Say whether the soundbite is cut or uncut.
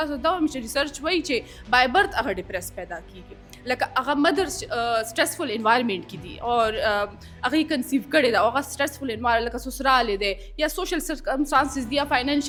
uncut